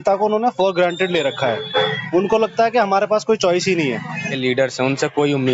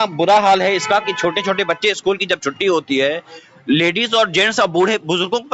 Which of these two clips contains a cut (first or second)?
first